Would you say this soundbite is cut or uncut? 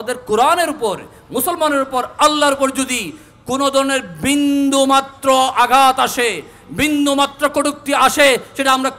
uncut